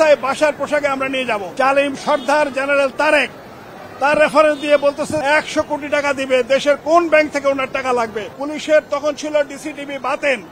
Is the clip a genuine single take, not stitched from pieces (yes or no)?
no